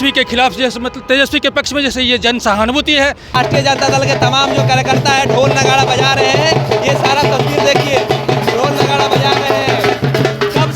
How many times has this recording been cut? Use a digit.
1